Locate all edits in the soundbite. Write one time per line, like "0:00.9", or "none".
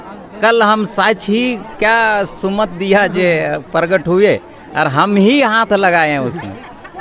none